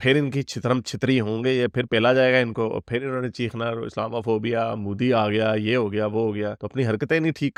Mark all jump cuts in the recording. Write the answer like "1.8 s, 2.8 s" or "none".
none